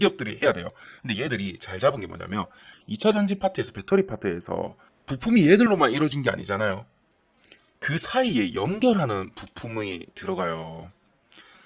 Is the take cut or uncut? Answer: uncut